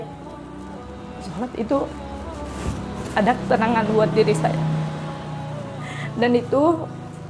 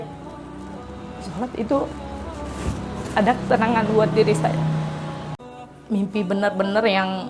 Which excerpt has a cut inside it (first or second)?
second